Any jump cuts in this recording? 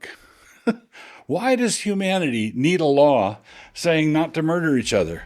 no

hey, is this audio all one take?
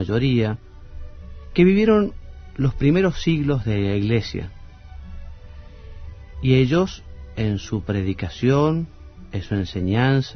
no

